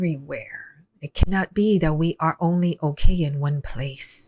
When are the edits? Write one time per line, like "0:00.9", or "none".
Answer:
none